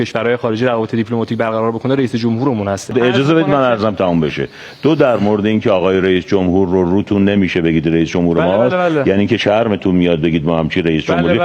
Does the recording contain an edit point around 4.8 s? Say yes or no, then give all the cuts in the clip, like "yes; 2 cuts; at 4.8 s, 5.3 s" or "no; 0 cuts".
no; 1 cut; at 2.9 s